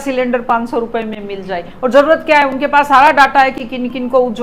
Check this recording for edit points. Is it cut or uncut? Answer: uncut